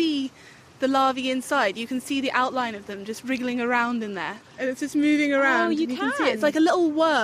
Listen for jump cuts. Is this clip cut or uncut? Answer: cut